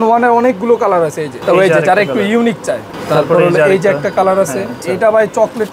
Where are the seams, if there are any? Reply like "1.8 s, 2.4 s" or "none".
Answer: 1.3 s, 2.9 s, 4.8 s